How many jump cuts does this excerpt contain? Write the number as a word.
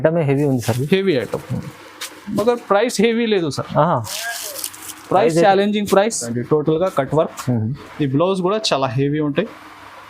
one